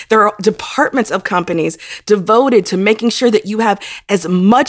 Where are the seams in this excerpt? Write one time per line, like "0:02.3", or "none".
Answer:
none